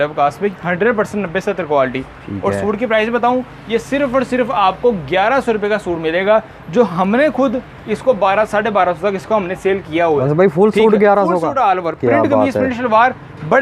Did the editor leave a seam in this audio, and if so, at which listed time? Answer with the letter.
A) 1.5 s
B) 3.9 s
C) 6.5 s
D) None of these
D